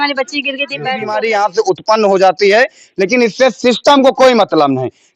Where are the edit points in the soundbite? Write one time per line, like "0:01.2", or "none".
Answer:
0:01.1